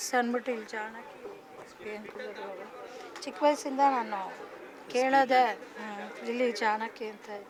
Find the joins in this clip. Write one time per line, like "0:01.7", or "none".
none